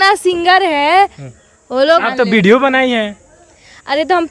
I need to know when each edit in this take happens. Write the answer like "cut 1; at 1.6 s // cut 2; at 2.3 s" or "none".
cut 1; at 2.1 s